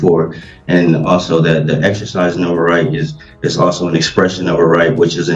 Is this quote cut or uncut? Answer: uncut